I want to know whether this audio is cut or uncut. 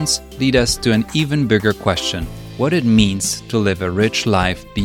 uncut